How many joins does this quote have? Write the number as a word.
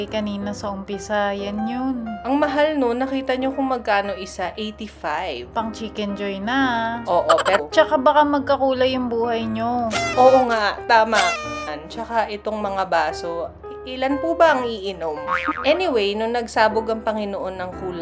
three